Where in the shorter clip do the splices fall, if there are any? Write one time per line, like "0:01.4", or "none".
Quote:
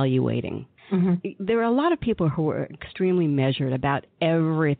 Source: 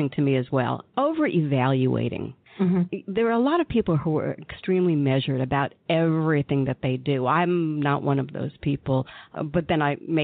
none